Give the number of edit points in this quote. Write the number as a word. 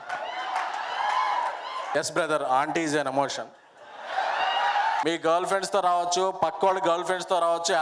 two